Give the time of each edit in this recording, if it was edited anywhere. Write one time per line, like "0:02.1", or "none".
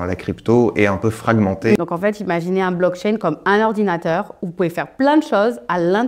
0:01.8